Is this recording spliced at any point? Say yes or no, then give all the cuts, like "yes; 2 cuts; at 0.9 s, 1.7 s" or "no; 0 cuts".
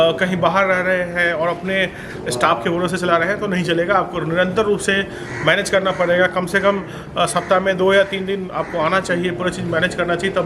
no; 0 cuts